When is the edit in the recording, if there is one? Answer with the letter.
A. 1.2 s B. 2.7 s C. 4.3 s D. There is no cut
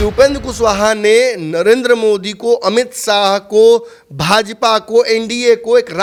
D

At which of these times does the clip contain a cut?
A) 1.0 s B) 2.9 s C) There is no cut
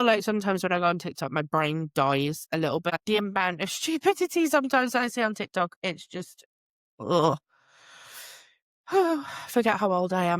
B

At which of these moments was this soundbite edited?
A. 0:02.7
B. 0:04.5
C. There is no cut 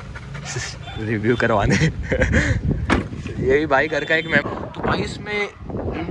B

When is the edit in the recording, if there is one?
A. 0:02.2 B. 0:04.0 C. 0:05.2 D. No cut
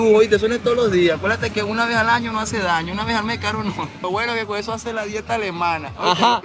B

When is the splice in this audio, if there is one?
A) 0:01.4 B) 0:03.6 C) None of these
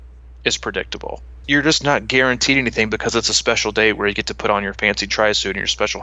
A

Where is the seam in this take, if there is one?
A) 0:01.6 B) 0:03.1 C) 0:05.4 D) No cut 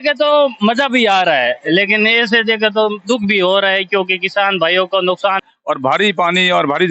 C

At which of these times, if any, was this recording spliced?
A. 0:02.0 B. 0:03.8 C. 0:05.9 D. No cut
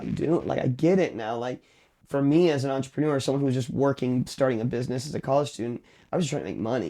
A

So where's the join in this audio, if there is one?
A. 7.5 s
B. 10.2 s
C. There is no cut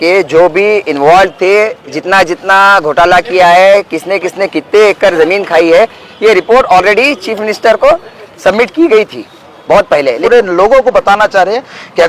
B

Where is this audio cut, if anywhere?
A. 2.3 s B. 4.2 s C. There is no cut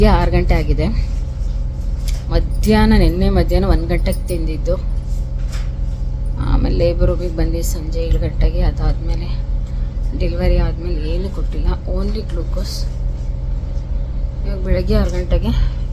C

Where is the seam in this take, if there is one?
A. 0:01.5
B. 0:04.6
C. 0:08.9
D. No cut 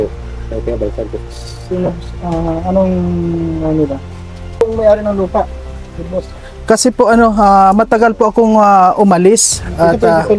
B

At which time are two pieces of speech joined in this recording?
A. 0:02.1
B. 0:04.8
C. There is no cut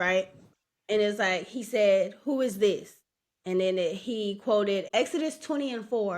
B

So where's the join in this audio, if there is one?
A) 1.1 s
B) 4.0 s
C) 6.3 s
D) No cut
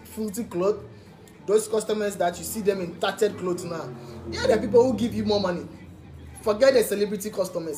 D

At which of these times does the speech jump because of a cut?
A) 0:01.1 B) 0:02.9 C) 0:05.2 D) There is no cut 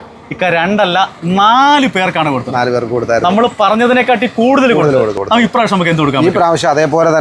C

